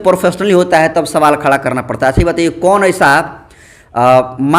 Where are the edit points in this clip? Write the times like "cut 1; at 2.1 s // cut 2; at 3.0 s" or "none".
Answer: none